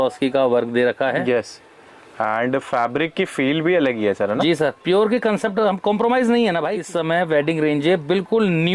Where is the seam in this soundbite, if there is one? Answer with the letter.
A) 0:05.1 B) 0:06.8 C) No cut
B